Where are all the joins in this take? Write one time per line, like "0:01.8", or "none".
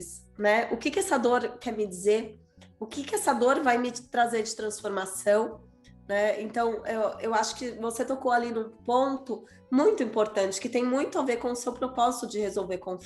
none